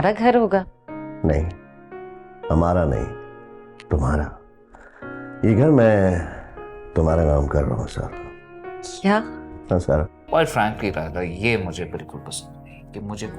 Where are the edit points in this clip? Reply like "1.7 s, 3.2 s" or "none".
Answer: 10.2 s